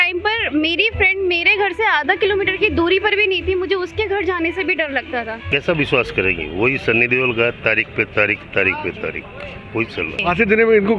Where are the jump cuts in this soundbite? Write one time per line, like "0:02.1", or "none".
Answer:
0:05.5
0:10.2

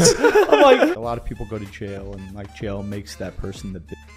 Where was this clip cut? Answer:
0:01.1

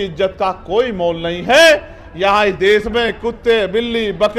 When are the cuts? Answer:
none

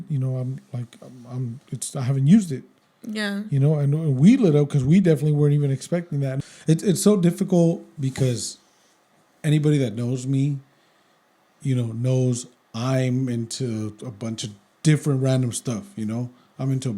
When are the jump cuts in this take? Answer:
0:06.3

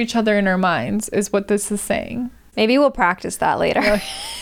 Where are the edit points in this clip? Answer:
0:02.5

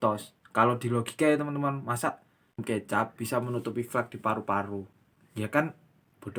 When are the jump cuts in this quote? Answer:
0:02.6

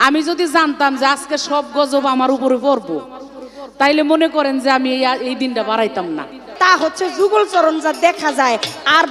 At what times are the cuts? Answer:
0:06.4

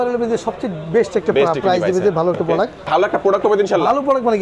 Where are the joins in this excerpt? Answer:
0:02.9

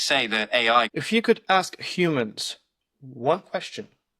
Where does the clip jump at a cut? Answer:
0:00.9

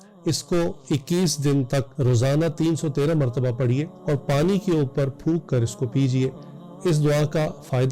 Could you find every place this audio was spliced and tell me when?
0:01.9
0:03.9

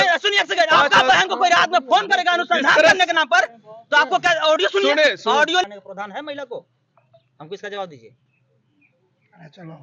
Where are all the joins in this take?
0:05.6

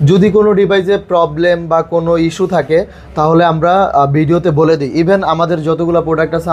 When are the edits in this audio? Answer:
none

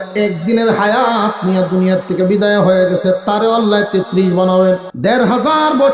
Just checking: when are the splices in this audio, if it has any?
0:04.9

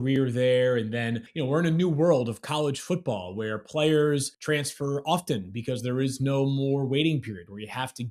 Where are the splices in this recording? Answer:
0:01.3
0:04.3

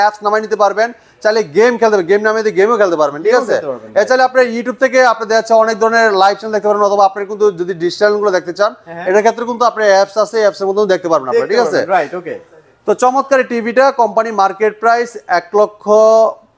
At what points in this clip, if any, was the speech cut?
none

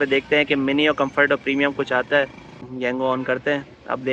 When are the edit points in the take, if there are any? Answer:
0:02.6

